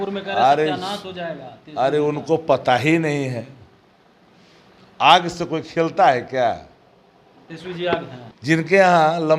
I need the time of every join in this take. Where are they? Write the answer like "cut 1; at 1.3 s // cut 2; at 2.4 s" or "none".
cut 1; at 8.2 s

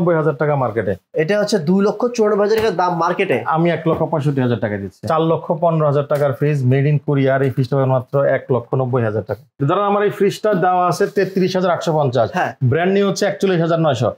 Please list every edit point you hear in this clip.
cut 1; at 5.1 s // cut 2; at 9.6 s

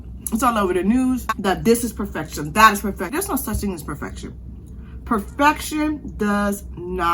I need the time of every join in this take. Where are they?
cut 1; at 1.3 s // cut 2; at 3.1 s

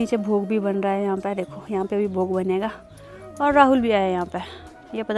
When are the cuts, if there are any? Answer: none

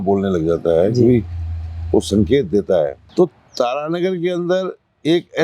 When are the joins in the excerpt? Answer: cut 1; at 3.0 s

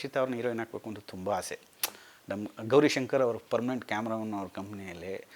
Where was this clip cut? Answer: none

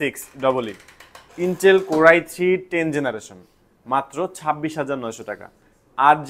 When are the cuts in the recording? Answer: none

